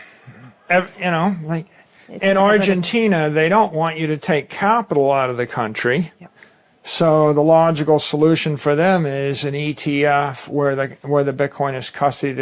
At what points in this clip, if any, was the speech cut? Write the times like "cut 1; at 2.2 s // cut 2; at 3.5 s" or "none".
none